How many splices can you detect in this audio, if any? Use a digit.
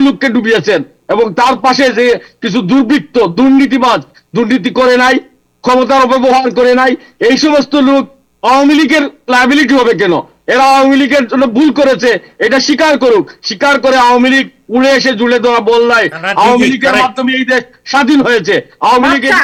0